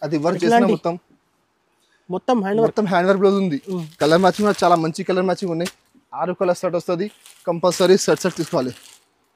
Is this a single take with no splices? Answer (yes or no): yes